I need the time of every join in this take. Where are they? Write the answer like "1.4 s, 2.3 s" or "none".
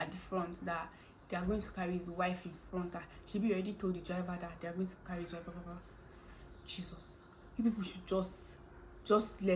none